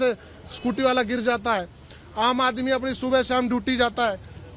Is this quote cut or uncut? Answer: uncut